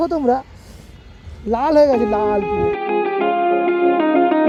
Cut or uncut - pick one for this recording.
uncut